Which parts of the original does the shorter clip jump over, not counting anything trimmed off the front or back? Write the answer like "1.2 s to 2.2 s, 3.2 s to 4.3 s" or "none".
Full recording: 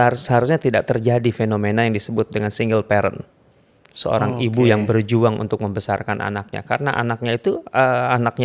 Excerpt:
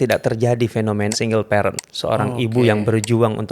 1.7 s to 2.5 s, 3.3 s to 3.9 s